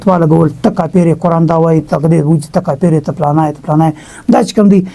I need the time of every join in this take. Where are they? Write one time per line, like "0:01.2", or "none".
none